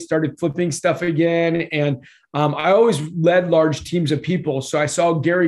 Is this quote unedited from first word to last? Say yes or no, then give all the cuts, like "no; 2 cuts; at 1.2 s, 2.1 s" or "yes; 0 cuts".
yes; 0 cuts